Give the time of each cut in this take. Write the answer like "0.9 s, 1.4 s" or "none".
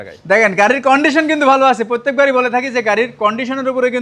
none